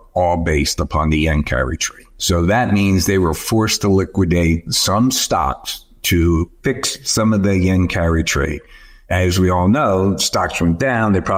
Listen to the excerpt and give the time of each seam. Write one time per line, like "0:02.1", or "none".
none